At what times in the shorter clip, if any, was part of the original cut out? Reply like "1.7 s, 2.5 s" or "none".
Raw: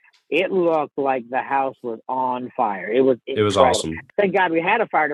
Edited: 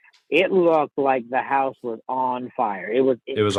none